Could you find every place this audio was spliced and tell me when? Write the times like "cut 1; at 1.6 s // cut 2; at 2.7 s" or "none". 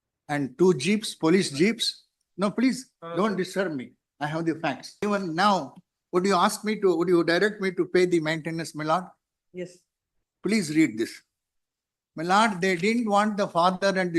cut 1; at 4.9 s